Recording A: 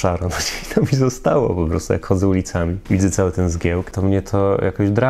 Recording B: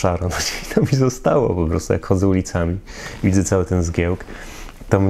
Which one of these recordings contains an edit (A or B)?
A